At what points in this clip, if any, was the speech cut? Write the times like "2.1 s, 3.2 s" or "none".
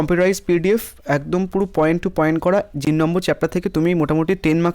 2.8 s